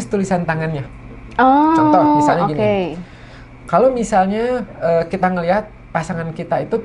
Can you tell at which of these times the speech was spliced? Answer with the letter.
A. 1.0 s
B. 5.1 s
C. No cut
C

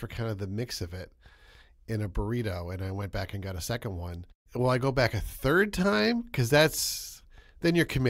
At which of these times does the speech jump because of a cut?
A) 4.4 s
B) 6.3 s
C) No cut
A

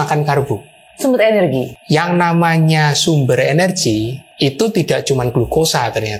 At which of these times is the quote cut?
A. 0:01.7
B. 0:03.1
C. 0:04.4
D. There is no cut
A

